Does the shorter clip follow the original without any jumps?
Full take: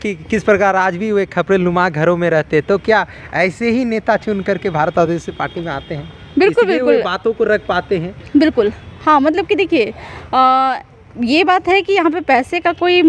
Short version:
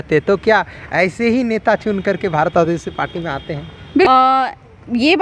no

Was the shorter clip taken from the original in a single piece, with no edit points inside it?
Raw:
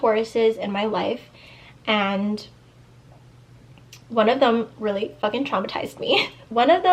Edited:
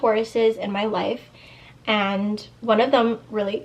no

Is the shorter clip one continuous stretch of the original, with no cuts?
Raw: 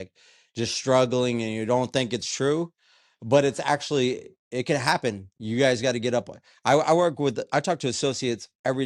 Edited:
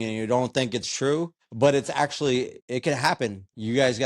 no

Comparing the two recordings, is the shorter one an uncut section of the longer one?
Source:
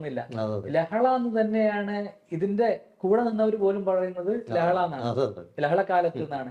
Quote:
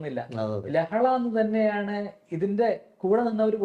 yes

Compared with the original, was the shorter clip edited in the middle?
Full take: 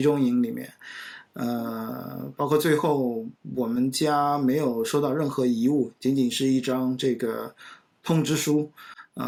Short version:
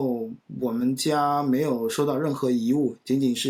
no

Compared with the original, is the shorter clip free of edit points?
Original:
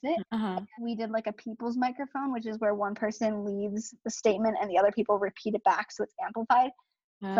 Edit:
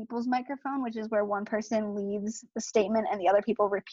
yes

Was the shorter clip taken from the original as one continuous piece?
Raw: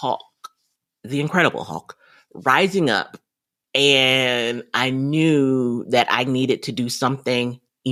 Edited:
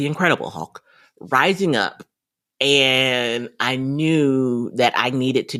yes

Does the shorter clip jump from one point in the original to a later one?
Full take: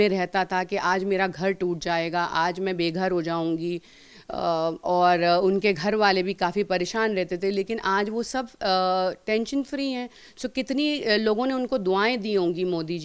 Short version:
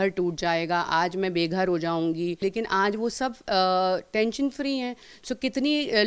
yes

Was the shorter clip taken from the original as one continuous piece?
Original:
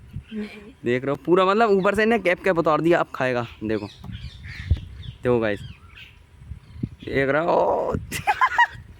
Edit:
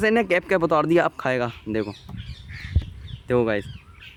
yes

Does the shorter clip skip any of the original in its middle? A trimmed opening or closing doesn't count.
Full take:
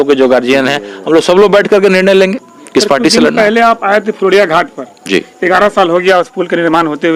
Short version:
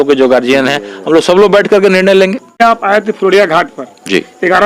yes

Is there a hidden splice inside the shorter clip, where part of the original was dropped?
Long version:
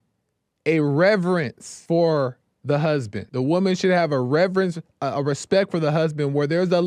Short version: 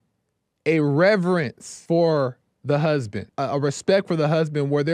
yes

